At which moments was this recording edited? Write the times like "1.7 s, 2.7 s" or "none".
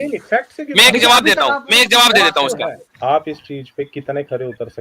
2.8 s